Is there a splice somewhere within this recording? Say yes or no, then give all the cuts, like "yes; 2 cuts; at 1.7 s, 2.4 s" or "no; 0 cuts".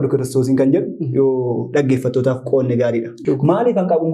yes; 1 cut; at 3.1 s